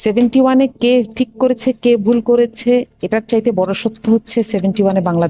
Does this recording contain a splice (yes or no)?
no